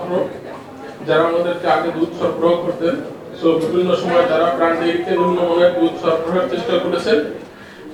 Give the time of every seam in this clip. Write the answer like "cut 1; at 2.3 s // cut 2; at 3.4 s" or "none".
none